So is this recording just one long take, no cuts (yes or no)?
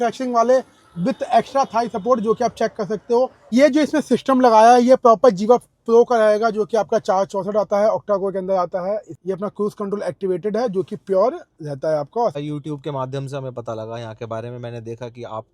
no